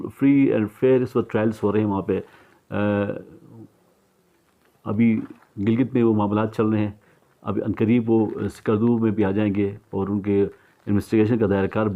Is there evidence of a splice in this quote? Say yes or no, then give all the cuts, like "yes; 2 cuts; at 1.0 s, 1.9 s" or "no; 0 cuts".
no; 0 cuts